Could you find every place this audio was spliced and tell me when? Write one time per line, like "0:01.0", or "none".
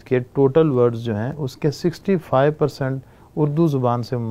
none